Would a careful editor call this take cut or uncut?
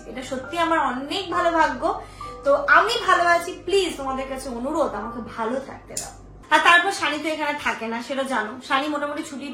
cut